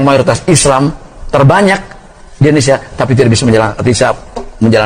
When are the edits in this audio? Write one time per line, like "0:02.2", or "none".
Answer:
none